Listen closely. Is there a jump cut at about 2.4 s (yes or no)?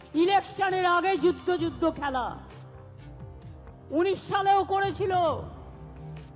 no